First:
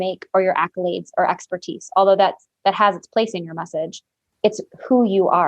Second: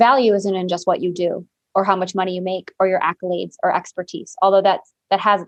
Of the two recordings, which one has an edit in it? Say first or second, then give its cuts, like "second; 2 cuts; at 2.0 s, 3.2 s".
first; 1 cut; at 4.3 s